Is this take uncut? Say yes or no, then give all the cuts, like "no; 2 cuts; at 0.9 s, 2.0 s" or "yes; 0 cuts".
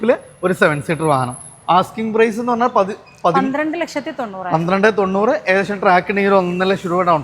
yes; 0 cuts